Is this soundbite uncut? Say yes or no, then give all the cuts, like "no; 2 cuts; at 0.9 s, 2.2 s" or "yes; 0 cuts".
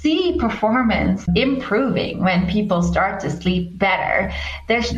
no; 1 cut; at 1.3 s